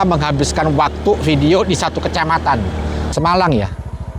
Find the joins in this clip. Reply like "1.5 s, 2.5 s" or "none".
3.1 s